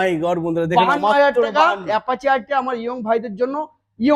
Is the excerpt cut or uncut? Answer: uncut